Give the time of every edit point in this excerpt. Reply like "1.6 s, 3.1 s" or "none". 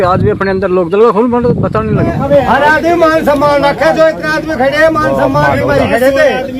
2.2 s